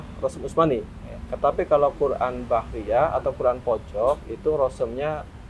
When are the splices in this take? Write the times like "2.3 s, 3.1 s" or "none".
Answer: none